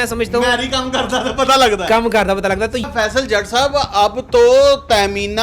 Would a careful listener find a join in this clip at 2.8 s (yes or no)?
yes